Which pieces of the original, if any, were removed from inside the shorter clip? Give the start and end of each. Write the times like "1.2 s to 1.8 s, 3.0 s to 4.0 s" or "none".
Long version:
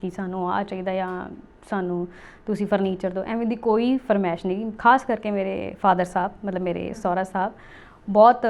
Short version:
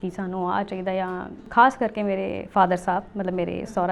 1.4 s to 4.7 s